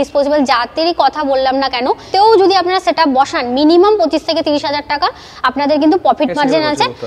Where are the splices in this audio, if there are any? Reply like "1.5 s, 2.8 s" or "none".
2.1 s